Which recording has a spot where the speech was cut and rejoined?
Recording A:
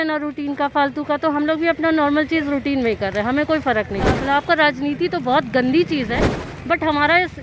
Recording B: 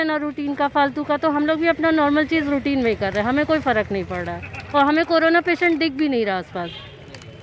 A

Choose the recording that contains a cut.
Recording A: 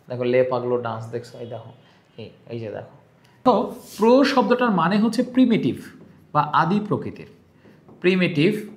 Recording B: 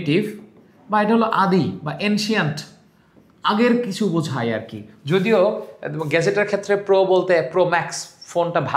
A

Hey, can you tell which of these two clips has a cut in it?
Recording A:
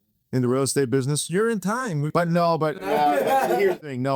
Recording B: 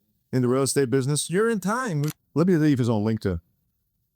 B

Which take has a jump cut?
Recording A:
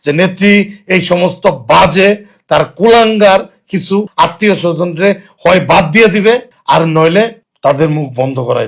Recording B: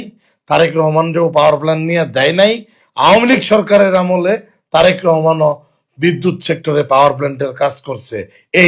A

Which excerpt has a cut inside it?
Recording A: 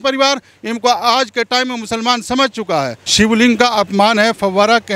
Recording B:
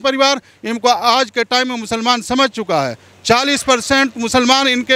A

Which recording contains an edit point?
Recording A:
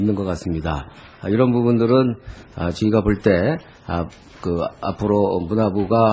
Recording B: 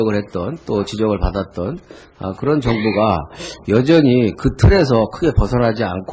B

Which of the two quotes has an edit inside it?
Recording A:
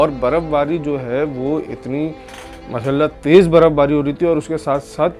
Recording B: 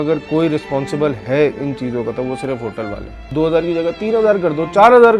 B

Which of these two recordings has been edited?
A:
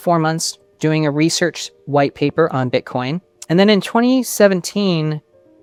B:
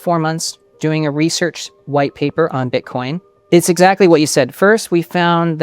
B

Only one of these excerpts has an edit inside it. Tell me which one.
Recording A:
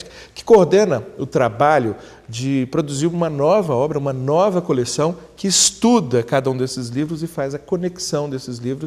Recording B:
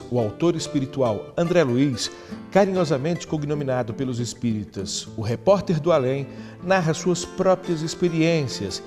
B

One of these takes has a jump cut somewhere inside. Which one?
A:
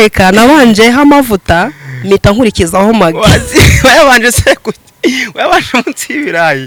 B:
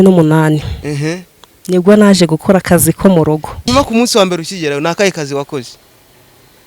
B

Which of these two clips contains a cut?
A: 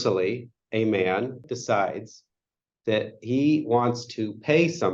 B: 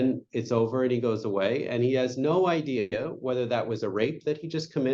A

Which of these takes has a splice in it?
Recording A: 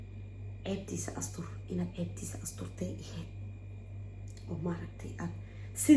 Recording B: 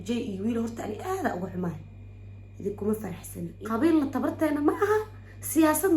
B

